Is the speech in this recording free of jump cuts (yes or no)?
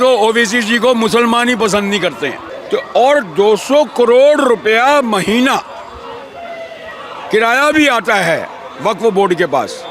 no